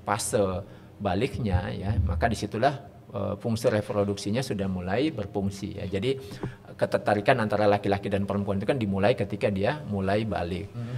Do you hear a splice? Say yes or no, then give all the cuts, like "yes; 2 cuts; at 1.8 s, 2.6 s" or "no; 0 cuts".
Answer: no; 0 cuts